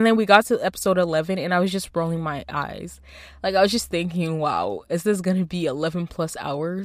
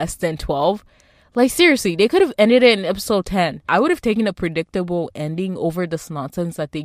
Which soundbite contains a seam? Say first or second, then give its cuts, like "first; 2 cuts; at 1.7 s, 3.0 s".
second; 1 cut; at 3.7 s